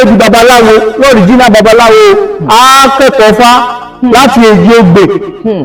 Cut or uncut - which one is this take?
uncut